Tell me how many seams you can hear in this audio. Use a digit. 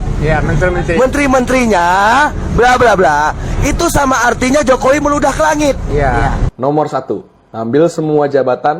1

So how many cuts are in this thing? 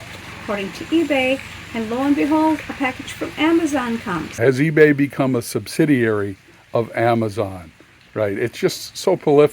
1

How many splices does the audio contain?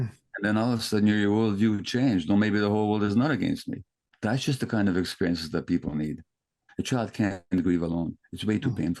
2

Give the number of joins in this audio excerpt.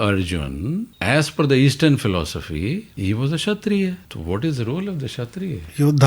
3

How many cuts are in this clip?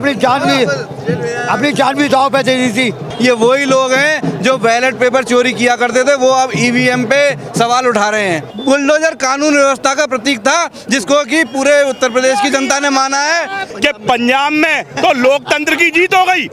3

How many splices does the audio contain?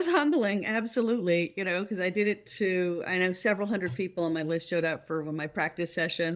0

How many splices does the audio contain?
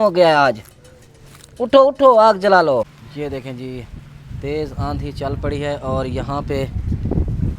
1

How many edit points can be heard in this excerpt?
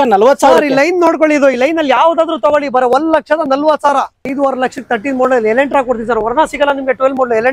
1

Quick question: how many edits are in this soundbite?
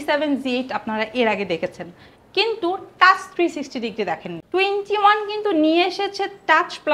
0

